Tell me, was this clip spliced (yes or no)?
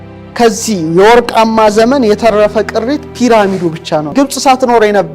yes